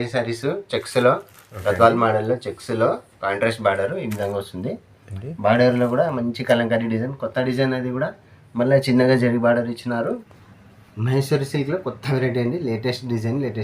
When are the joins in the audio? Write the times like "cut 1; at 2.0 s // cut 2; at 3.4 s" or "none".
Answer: cut 1; at 10.2 s